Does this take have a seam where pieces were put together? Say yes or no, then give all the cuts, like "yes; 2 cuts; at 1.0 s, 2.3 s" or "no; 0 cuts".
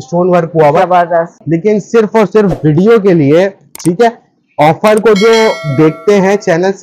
yes; 1 cut; at 1.4 s